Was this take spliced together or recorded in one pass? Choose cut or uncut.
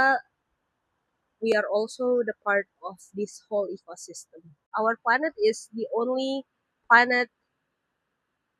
cut